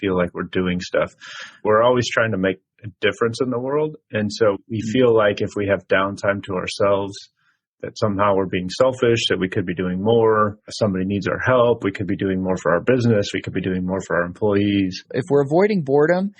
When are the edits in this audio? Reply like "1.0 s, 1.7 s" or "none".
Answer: 1.6 s, 4.6 s, 15.0 s